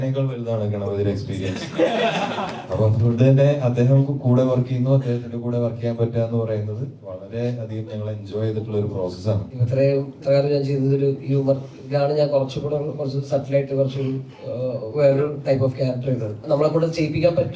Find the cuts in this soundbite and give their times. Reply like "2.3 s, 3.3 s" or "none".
9.5 s, 16.4 s